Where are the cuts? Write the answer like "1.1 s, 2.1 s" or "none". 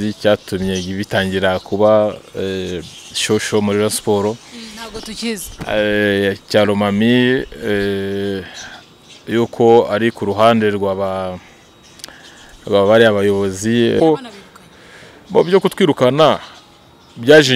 14.0 s